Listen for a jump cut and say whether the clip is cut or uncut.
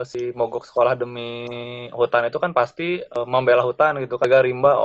uncut